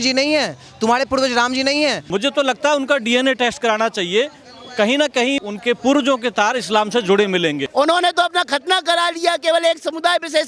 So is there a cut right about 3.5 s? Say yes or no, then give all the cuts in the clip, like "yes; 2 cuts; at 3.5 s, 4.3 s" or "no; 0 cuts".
no; 3 cuts; at 2.0 s, 5.4 s, 7.6 s